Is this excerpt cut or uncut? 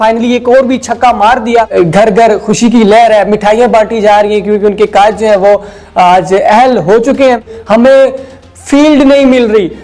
cut